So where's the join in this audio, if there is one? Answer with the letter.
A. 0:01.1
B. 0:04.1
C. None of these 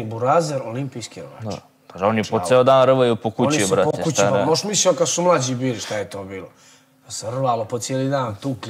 C